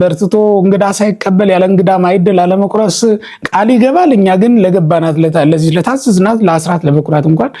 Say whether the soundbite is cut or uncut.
uncut